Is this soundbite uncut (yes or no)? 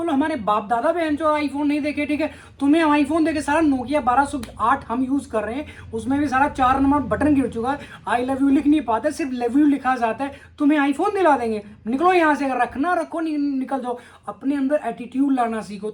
yes